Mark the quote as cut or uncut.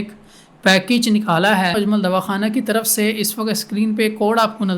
cut